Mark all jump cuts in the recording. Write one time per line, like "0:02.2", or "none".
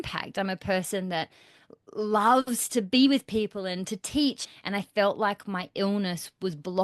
0:04.4